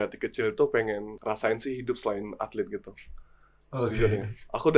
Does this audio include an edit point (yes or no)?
yes